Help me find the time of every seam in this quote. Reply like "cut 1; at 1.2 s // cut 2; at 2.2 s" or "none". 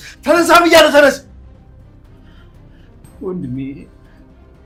none